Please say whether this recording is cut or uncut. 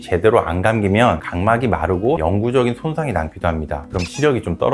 uncut